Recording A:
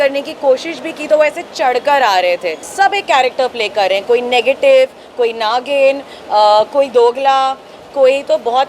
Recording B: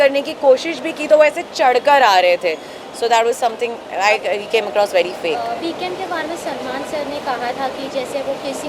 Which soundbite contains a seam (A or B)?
A